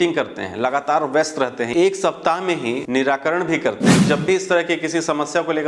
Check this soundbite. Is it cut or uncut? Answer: cut